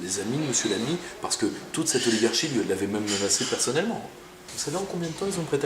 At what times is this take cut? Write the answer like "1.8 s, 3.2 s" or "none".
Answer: 4.5 s